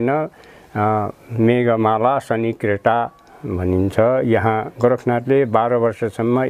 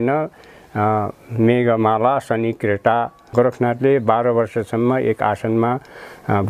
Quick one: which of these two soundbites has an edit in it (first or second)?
second